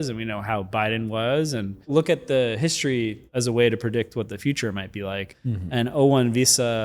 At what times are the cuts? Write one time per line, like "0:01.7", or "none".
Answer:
0:01.9
0:03.2
0:05.3